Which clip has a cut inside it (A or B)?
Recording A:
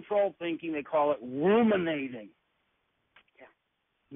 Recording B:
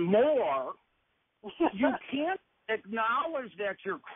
B